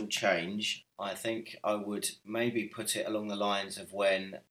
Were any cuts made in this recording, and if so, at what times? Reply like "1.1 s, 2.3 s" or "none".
none